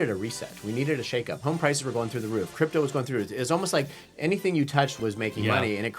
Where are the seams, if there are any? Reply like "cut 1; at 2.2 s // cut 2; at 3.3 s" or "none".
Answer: cut 1; at 1.4 s // cut 2; at 4.9 s